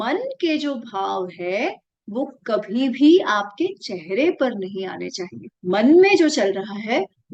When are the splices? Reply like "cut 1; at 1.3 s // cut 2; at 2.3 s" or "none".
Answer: none

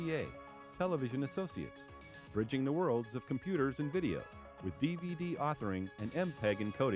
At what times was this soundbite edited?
none

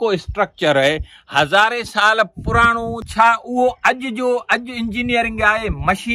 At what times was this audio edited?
cut 1; at 3.0 s

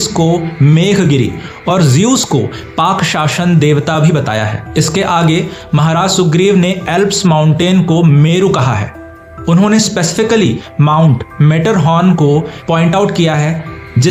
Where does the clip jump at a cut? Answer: none

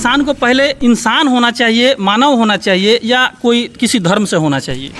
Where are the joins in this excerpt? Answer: none

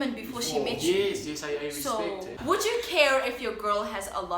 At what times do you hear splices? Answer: cut 1; at 2.3 s

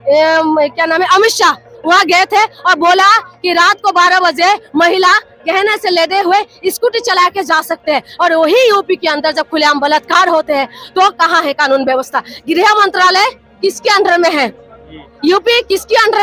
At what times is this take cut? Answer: none

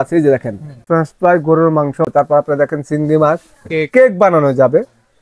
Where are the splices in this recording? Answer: cut 1; at 0.8 s // cut 2; at 2.1 s

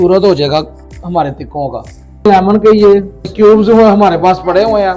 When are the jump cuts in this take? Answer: cut 1; at 2.3 s // cut 2; at 3.3 s

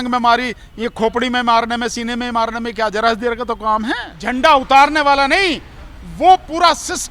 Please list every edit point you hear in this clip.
cut 1; at 4.1 s

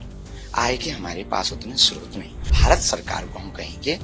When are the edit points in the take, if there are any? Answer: cut 1; at 2.5 s

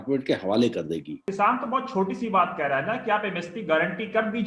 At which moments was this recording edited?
cut 1; at 1.2 s

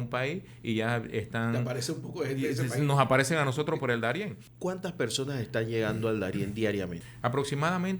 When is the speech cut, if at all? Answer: cut 1; at 4.4 s // cut 2; at 7.0 s

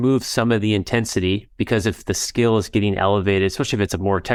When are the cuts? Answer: none

